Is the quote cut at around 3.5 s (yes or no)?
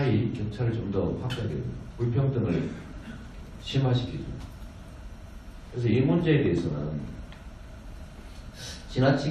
yes